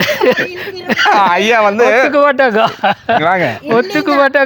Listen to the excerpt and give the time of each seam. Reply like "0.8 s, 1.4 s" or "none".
none